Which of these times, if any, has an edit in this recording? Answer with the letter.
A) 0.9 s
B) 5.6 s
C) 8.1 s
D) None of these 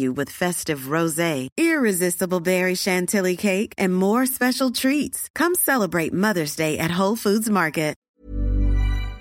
C